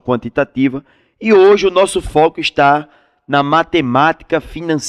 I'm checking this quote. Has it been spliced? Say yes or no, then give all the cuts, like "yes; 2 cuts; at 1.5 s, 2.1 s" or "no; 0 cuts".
no; 0 cuts